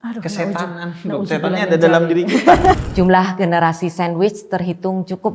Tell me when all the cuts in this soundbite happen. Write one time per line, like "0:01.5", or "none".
0:02.8

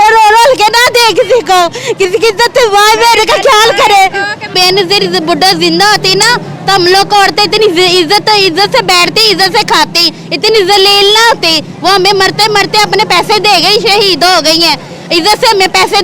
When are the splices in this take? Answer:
0:04.5

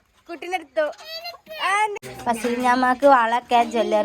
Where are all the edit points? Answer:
0:02.0

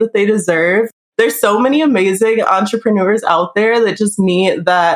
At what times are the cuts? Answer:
0:01.0

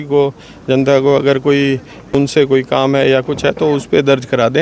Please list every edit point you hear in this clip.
0:02.2

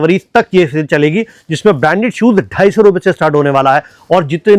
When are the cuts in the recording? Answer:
none

